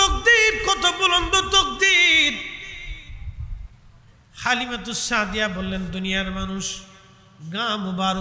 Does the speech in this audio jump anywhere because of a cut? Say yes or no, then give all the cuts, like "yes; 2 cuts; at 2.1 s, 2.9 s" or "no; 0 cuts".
no; 0 cuts